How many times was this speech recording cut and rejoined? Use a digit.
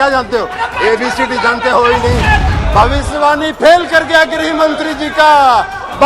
1